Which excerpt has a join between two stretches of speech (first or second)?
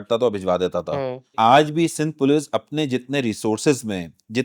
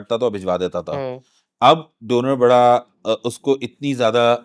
first